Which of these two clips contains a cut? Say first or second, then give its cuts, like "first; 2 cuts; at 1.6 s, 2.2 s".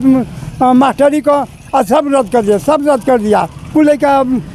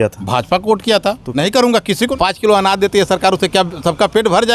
second; 2 cuts; at 1.2 s, 2.1 s